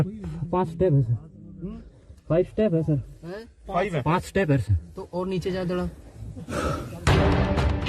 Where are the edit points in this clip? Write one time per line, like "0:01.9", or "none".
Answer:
0:06.9